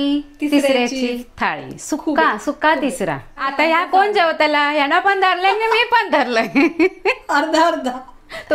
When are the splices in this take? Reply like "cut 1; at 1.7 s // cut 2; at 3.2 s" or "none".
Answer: cut 1; at 3.5 s